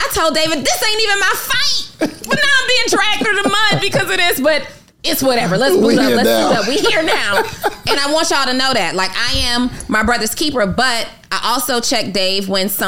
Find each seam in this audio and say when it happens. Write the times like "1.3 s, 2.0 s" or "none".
none